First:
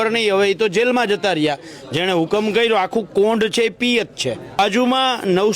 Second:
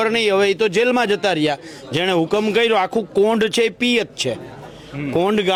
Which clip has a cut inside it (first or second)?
first